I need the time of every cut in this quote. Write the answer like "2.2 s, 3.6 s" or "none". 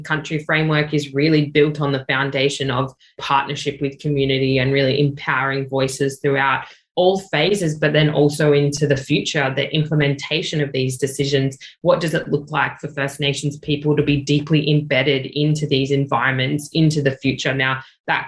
3.2 s